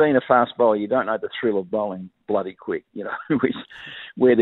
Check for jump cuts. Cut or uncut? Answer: uncut